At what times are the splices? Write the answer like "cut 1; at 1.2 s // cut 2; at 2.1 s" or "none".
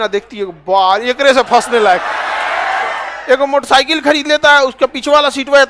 cut 1; at 3.1 s